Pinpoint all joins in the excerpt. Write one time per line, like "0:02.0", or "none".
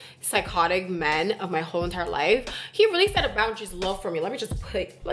none